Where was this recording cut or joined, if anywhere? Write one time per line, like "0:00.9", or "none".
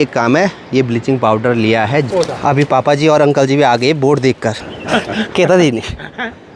0:02.1
0:04.7